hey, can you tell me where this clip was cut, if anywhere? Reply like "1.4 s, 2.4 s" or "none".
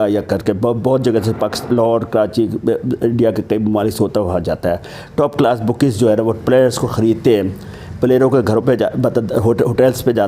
none